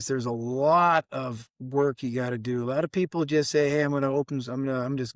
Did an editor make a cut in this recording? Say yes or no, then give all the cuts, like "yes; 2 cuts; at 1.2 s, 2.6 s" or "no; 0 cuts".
no; 0 cuts